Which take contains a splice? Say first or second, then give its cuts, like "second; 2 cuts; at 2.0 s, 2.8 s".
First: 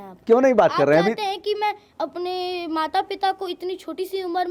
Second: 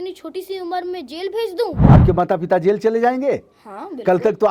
second; 1 cut; at 1.8 s